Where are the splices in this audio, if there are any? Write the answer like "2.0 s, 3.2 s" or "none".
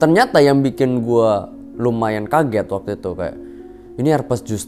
none